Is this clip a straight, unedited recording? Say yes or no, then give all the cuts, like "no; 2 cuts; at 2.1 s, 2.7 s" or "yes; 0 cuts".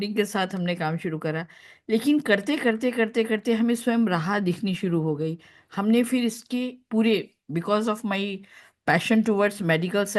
yes; 0 cuts